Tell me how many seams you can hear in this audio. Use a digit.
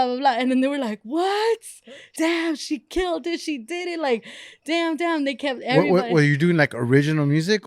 1